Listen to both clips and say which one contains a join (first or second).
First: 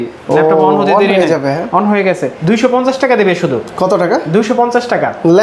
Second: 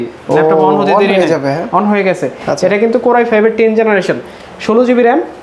first